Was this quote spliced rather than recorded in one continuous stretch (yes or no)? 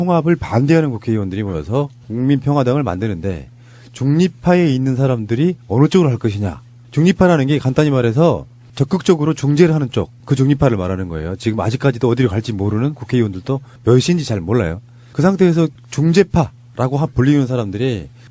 no